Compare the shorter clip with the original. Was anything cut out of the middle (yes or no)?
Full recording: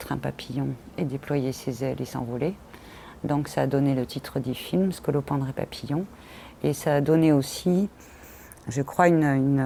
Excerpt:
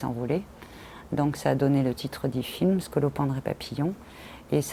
no